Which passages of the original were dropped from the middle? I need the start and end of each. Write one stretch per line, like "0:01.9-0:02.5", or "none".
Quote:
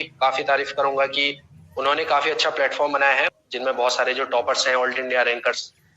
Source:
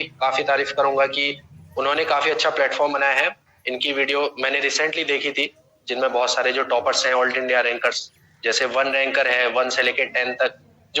0:03.9-0:06.3